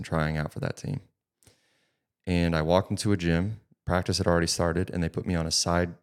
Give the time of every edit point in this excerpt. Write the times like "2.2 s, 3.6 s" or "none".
none